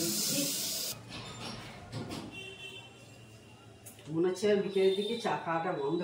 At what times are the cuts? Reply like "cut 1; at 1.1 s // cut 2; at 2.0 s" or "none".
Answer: cut 1; at 0.9 s